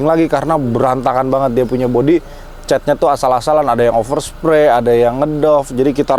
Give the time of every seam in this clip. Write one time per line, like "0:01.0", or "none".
none